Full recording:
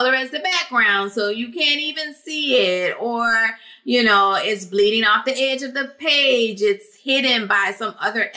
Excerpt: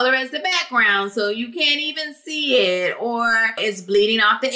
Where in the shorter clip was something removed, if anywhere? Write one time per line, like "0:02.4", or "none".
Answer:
0:03.6